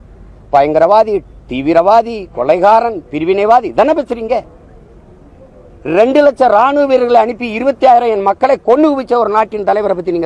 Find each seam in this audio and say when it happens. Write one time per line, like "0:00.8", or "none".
none